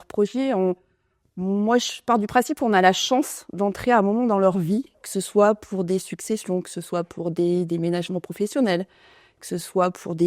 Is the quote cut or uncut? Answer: uncut